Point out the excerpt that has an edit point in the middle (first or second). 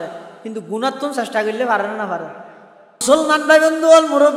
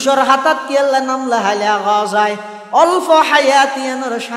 first